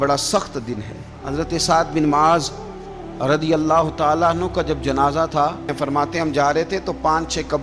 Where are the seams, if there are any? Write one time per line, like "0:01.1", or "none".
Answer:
0:01.2
0:05.7